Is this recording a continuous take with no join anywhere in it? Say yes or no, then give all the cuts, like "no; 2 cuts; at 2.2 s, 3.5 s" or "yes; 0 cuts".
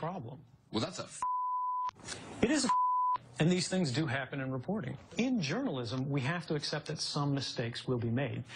no; 1 cut; at 5.5 s